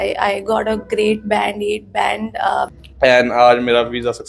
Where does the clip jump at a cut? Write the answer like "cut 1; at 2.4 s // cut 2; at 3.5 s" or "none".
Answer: cut 1; at 2.8 s

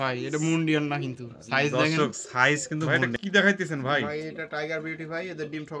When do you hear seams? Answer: cut 1; at 3.0 s

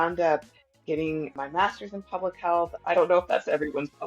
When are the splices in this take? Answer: cut 1; at 1.3 s // cut 2; at 2.7 s

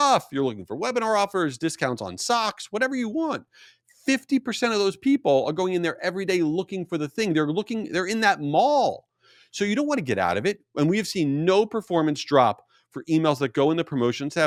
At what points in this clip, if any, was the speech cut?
none

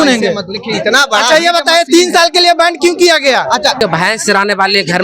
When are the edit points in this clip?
cut 1; at 3.8 s

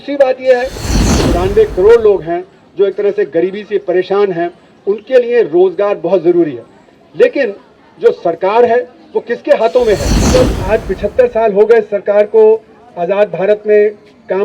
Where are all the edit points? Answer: cut 1; at 0.9 s // cut 2; at 10.1 s

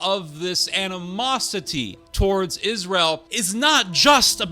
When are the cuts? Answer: cut 1; at 2.0 s // cut 2; at 3.3 s

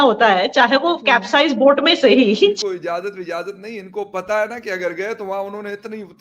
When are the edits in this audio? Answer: cut 1; at 2.6 s

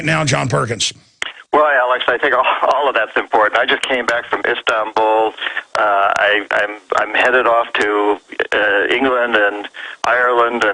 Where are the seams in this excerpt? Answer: cut 1; at 5.6 s

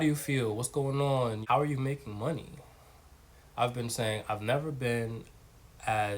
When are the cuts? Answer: cut 1; at 1.4 s

